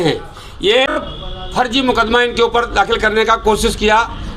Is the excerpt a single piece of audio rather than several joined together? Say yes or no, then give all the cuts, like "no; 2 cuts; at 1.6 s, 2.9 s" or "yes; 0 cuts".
no; 1 cut; at 0.9 s